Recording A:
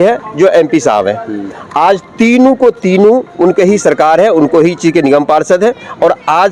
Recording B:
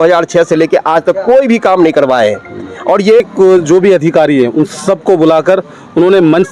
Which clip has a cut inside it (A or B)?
B